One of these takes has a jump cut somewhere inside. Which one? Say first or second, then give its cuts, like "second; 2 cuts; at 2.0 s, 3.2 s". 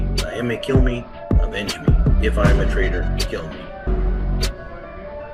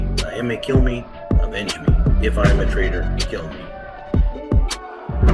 second; 1 cut; at 3.8 s